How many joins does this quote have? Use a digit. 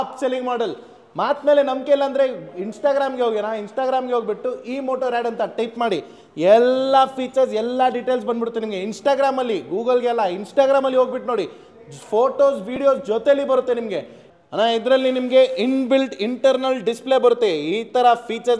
1